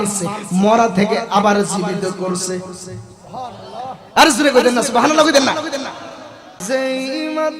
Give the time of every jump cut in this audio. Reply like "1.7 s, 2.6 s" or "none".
6.5 s